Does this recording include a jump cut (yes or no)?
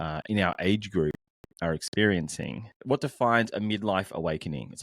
yes